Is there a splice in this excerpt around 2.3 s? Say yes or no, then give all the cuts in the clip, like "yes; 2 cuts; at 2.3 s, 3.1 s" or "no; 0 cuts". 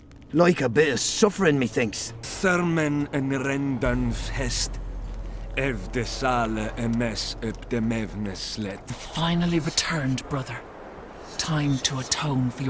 yes; 2 cuts; at 2.3 s, 9.0 s